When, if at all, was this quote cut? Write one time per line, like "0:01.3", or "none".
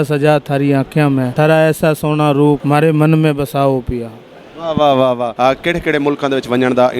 0:01.3
0:02.6
0:05.3